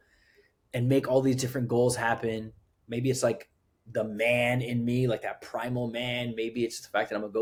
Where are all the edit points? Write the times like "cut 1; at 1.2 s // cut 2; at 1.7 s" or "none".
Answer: none